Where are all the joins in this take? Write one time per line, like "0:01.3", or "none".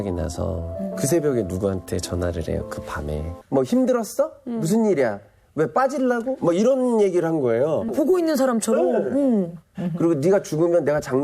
0:03.3
0:07.9